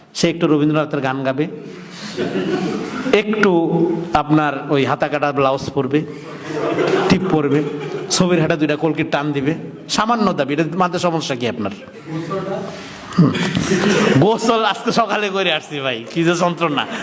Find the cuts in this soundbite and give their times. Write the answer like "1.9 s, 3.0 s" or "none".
none